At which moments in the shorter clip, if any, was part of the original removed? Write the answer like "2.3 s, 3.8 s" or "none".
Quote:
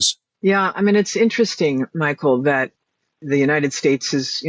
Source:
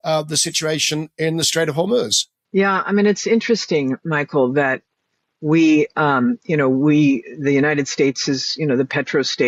3.2 s